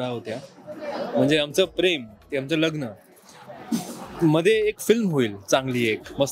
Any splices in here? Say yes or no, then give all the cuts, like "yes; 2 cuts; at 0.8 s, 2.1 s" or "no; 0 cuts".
no; 0 cuts